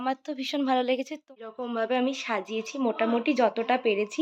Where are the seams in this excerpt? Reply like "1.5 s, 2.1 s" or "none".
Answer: 1.0 s